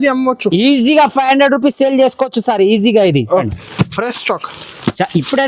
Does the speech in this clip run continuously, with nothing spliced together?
no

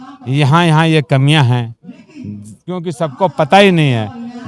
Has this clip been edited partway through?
no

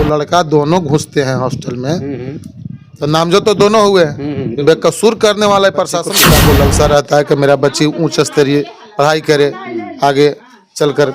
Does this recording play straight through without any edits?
no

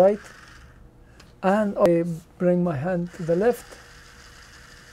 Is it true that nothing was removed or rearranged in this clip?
no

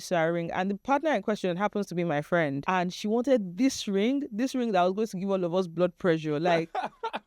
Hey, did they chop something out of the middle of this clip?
yes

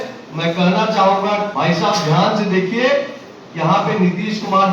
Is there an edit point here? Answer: yes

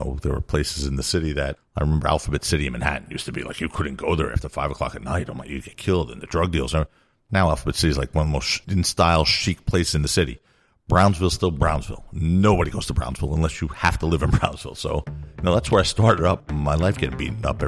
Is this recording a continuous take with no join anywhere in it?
no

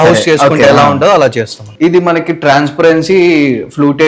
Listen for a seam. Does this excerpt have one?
yes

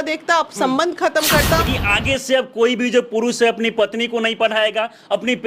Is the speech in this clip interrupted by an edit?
yes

